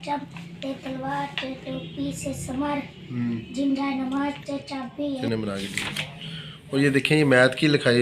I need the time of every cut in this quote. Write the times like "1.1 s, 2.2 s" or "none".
5.2 s